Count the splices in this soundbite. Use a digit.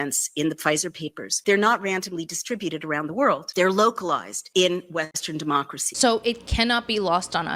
1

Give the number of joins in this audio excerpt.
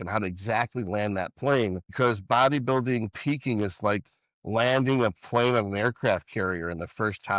1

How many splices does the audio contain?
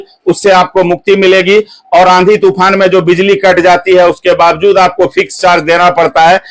0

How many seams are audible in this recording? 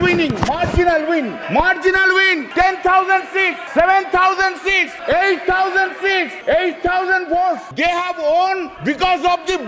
7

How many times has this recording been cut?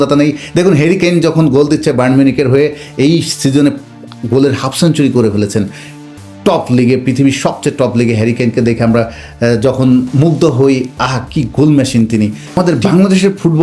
1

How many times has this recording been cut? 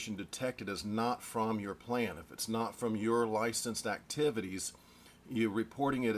0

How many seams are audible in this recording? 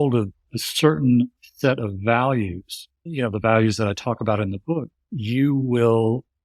1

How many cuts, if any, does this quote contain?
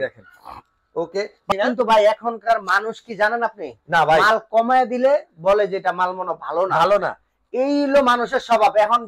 1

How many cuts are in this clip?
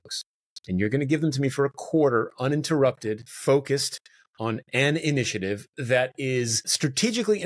1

